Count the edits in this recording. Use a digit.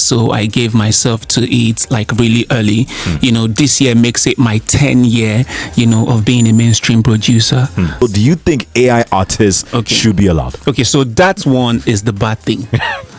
1